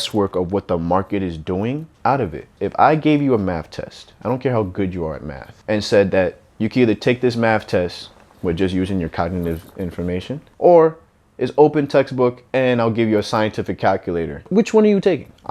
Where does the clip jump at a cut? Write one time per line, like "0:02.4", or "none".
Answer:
0:01.9
0:02.5
0:10.4
0:14.5